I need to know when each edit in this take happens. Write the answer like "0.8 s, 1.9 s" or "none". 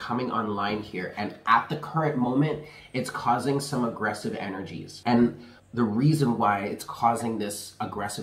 4.8 s, 5.5 s